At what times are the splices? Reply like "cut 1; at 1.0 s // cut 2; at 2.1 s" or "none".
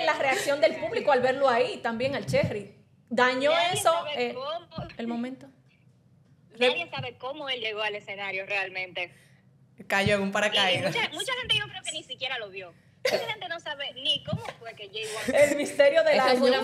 none